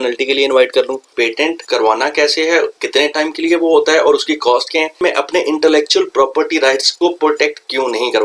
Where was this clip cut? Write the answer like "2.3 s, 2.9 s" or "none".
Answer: 1.3 s, 2.8 s, 5.0 s, 6.9 s